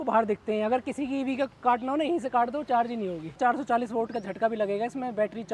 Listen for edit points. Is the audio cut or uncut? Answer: cut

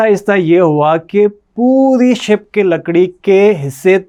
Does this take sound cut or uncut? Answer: uncut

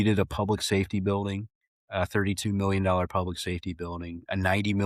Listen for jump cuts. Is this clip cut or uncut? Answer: uncut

